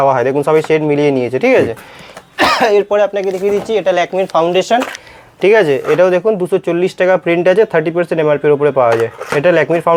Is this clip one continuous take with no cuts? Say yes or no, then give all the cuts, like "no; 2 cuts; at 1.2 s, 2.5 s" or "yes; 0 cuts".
yes; 0 cuts